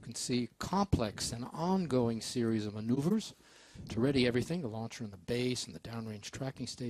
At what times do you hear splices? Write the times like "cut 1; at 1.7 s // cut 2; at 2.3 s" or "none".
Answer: cut 1; at 3.7 s